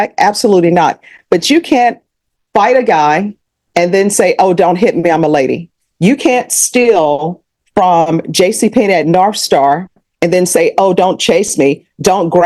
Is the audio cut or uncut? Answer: uncut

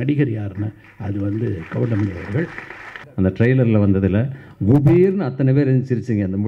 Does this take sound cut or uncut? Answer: cut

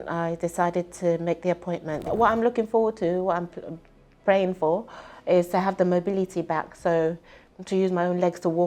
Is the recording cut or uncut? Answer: cut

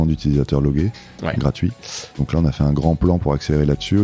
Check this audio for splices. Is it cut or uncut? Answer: cut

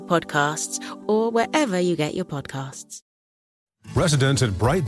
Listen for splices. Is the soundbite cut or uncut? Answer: cut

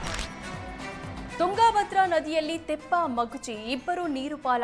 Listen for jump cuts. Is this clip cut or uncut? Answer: cut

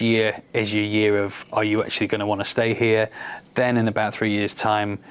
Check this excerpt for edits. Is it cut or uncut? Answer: uncut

